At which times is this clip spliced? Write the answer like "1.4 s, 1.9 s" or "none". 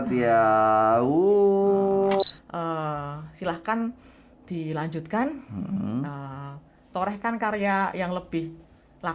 2.2 s